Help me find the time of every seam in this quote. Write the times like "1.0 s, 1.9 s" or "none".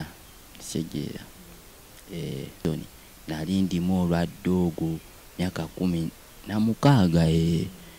2.6 s